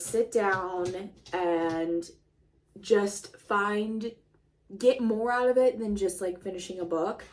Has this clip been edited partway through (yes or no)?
no